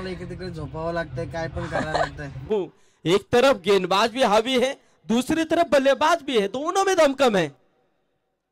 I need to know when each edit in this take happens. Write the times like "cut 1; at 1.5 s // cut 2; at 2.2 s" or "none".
cut 1; at 2.5 s